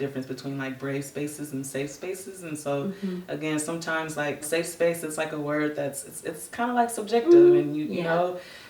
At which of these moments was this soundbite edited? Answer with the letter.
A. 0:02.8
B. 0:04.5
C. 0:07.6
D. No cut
B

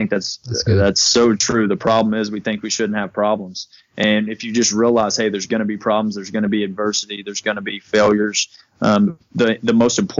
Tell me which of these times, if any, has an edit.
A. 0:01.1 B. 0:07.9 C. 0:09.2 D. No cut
C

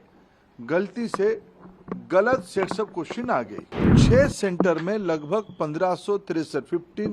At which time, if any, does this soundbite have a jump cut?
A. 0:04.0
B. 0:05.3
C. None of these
A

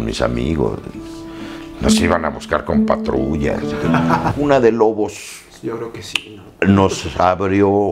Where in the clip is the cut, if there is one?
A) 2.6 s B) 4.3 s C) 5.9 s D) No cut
B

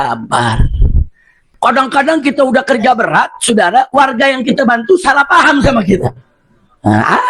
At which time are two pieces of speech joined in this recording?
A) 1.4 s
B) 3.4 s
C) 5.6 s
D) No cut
A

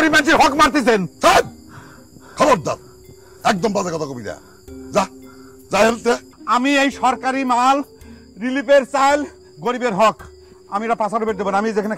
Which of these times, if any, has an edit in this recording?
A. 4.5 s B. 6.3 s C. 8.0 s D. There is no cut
B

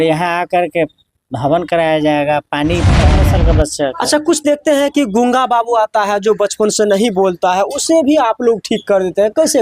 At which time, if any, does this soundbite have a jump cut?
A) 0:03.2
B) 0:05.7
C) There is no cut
A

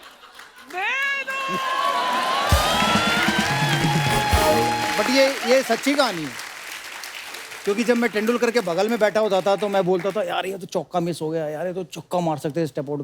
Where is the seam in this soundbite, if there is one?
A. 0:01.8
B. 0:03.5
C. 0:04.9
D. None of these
C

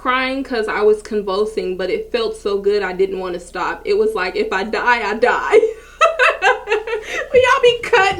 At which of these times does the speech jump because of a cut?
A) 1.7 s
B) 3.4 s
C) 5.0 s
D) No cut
D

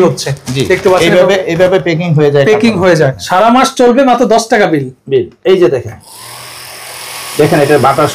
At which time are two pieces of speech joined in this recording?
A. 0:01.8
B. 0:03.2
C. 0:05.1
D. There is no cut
B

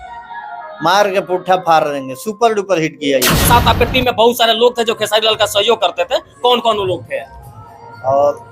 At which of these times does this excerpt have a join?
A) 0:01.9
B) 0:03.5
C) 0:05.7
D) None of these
B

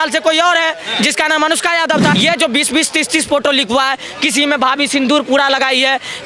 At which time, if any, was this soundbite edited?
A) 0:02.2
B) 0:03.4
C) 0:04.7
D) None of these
A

